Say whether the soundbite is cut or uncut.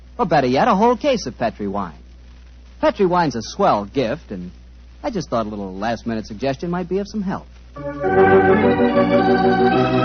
uncut